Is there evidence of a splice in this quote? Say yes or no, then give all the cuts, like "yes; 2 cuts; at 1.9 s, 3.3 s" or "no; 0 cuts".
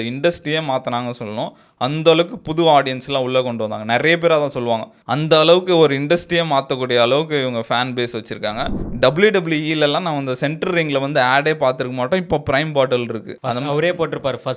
yes; 2 cuts; at 5.0 s, 8.8 s